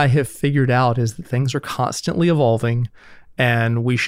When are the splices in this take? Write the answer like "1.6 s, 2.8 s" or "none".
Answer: none